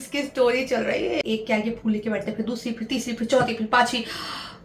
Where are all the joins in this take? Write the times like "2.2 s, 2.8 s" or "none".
1.2 s